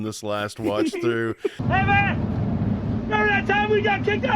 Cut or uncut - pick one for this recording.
cut